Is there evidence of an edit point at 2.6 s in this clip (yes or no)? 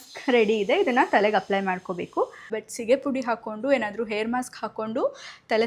yes